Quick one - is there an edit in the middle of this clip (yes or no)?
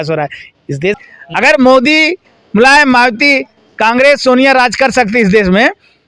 yes